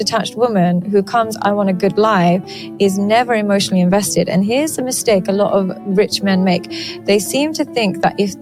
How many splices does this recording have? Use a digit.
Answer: 0